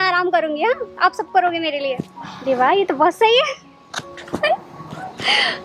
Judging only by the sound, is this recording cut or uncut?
uncut